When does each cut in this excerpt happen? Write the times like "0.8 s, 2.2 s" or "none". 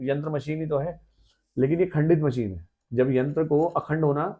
none